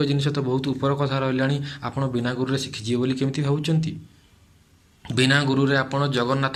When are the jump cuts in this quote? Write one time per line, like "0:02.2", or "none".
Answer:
none